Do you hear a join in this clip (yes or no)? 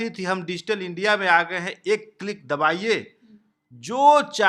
no